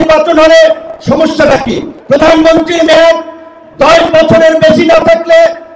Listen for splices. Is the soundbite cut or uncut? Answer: cut